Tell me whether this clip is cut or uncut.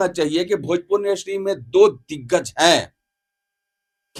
uncut